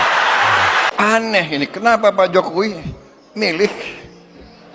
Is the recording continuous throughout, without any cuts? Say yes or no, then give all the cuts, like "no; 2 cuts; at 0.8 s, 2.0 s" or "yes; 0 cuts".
no; 1 cut; at 0.9 s